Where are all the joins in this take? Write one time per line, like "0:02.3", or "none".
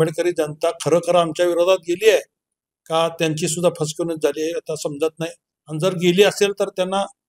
none